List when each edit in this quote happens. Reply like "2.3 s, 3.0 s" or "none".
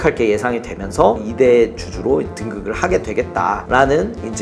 1.2 s